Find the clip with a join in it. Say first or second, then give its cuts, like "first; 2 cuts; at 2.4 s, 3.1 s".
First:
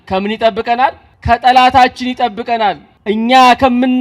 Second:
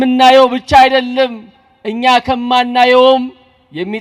first; 2 cuts; at 1.1 s, 2.9 s